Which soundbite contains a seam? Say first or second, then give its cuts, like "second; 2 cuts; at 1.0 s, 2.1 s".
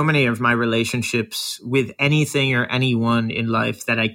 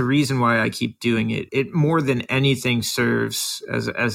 second; 1 cut; at 1.4 s